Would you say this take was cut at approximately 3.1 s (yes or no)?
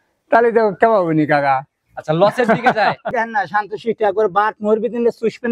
yes